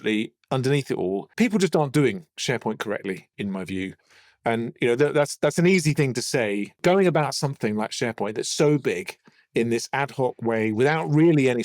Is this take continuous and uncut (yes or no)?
no